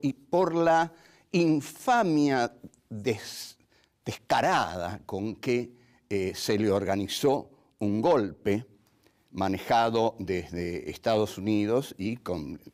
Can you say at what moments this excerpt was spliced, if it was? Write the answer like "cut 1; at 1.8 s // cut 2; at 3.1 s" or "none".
cut 1; at 1.7 s